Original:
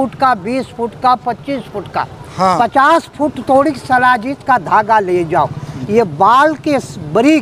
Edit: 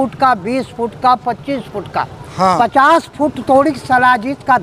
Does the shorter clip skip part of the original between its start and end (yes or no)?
no